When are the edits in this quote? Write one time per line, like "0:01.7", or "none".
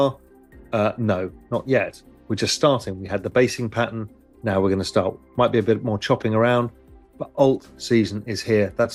none